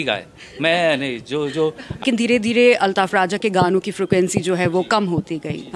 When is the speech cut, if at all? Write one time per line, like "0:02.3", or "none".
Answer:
0:02.0